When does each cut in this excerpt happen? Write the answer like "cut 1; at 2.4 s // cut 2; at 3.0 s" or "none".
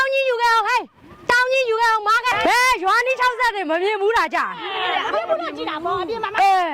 cut 1; at 2.3 s